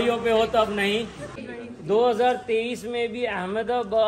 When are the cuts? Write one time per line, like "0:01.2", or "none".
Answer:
0:01.3